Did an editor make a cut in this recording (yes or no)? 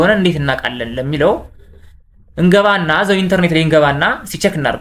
no